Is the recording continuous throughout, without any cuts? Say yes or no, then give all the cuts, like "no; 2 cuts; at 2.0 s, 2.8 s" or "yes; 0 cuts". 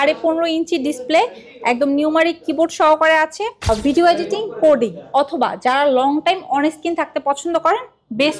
no; 1 cut; at 3.6 s